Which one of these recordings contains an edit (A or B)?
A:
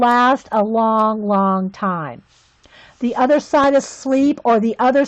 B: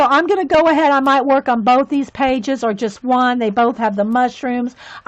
A